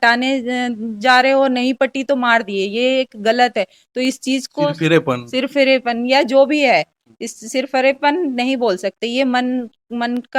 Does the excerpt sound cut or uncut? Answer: uncut